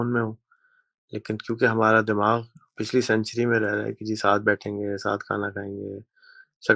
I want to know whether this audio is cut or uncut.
uncut